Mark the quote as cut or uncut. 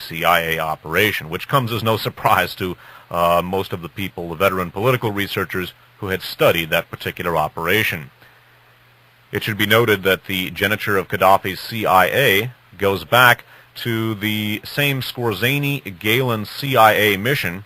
cut